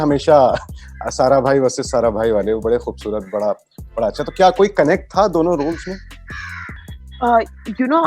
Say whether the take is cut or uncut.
uncut